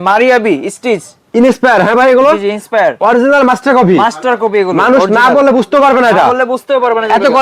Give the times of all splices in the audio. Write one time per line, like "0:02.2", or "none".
none